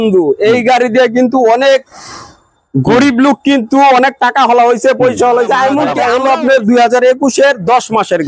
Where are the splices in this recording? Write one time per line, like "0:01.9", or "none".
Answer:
0:05.9